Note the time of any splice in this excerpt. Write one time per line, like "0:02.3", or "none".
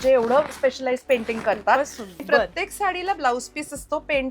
0:02.2